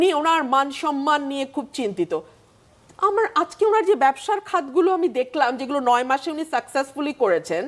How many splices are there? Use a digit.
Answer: 0